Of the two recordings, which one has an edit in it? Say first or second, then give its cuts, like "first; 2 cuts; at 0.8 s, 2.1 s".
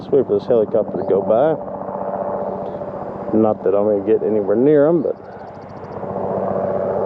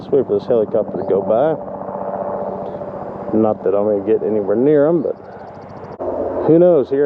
second; 1 cut; at 6.0 s